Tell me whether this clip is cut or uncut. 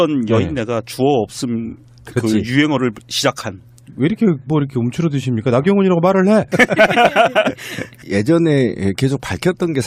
uncut